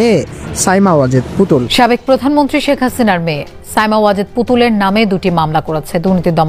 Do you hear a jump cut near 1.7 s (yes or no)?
yes